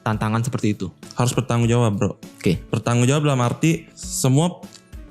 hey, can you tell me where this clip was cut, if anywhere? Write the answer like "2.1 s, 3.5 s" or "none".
1.1 s